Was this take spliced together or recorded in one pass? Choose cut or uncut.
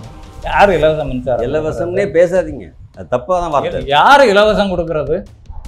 uncut